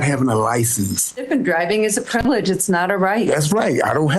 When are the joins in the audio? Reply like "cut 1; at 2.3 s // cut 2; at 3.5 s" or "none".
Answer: cut 1; at 1.2 s